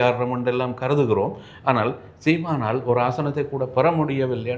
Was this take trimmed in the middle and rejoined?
no; 0 cuts

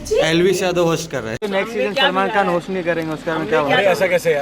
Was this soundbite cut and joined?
yes; 1 cut; at 1.4 s

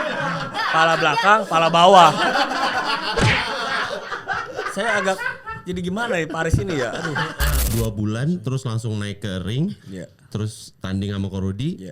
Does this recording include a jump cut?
yes; 1 cut; at 7.6 s

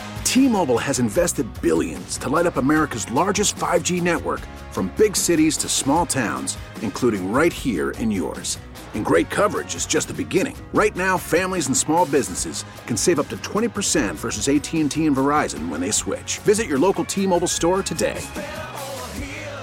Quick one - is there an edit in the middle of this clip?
no; 0 cuts

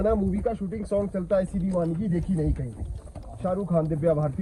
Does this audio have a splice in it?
no; 0 cuts

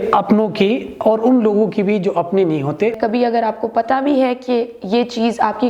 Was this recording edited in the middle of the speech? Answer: yes; 1 cut; at 2.9 s

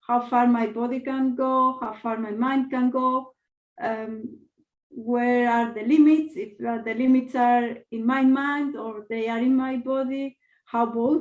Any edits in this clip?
no; 0 cuts

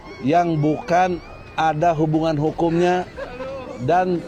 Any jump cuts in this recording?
no; 0 cuts

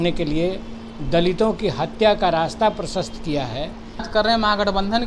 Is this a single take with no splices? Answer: no; 1 cut; at 4.1 s

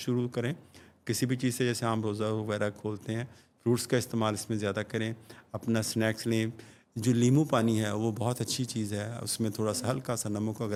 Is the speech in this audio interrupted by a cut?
no; 0 cuts

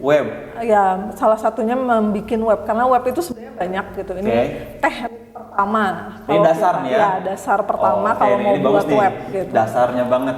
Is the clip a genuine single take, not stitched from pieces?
yes; 0 cuts

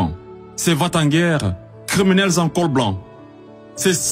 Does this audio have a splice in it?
no; 0 cuts

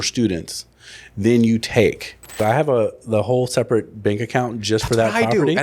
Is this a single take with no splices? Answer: no; 1 cut; at 2.4 s

